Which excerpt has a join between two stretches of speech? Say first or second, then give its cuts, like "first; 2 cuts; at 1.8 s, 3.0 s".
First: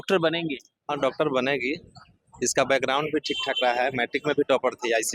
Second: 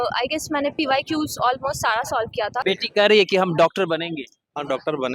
second; 1 cut; at 2.6 s